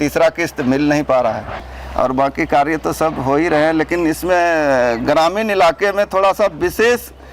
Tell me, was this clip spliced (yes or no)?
yes